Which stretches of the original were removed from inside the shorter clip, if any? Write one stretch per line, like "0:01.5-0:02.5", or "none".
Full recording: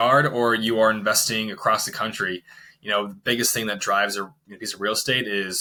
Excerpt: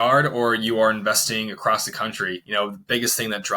0:02.4-0:02.8